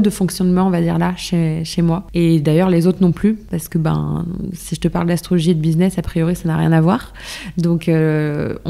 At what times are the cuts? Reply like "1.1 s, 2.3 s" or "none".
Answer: 2.1 s, 3.4 s

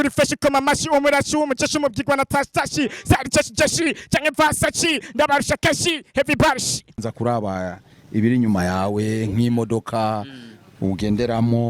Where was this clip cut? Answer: 6.9 s

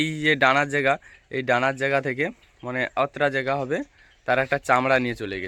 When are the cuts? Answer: none

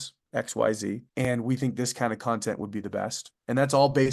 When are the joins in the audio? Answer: 1.2 s

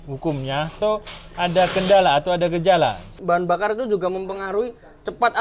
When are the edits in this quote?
0.8 s, 3.1 s

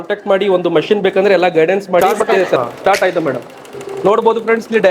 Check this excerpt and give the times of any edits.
2.0 s

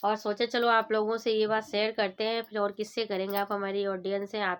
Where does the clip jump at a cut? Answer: none

